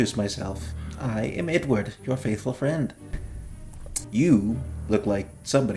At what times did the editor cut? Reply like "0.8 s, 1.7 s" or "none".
none